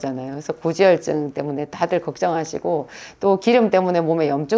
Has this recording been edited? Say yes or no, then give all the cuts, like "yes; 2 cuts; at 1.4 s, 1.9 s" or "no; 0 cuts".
no; 0 cuts